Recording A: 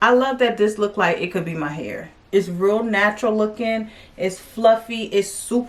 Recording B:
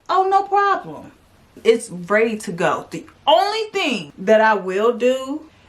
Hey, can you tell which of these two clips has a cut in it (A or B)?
B